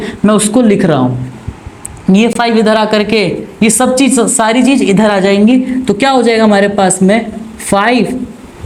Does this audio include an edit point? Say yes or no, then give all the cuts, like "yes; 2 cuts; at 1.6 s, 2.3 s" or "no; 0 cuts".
no; 0 cuts